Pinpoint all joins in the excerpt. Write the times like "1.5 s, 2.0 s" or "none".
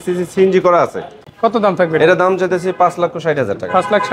1.2 s